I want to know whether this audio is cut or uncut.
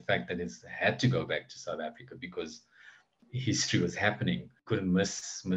cut